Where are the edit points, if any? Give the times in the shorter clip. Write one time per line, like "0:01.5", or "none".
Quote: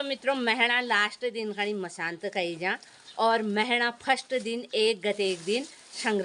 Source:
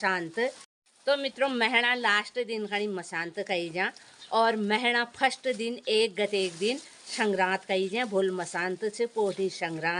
none